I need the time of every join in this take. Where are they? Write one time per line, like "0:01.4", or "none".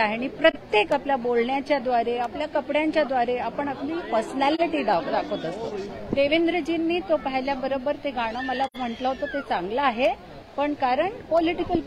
0:05.9